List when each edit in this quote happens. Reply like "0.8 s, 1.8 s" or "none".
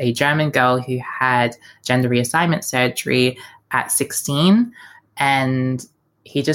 none